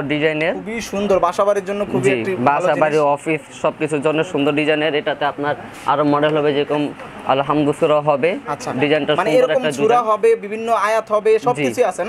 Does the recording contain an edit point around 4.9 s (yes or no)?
no